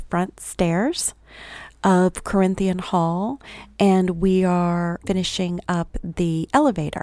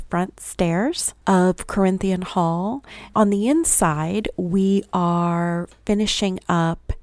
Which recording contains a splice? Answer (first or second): second